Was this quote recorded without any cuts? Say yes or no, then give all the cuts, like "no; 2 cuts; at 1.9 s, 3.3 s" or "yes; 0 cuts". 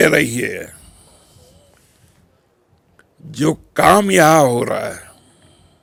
yes; 0 cuts